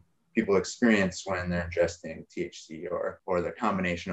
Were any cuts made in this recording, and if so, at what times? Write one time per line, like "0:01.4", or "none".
0:03.2